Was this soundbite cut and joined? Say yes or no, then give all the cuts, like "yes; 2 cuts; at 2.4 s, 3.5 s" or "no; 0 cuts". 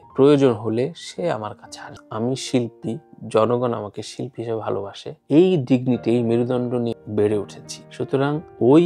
yes; 1 cut; at 6.9 s